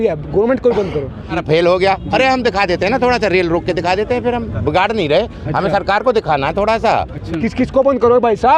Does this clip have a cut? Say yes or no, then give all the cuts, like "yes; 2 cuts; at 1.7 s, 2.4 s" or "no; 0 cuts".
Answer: yes; 2 cuts; at 1.3 s, 7.2 s